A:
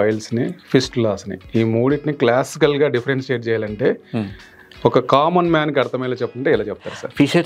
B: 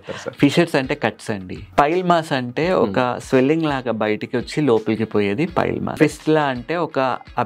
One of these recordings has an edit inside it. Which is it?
B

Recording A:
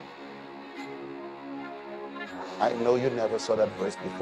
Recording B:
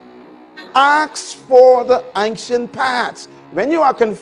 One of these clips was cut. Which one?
A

